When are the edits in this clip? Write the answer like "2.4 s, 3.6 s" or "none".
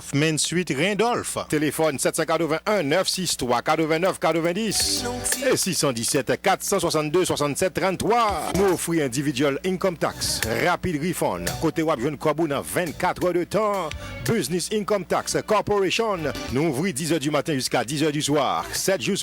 1.5 s